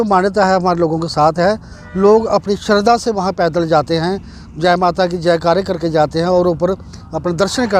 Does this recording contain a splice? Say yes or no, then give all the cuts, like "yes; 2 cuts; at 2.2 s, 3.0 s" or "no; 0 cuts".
no; 0 cuts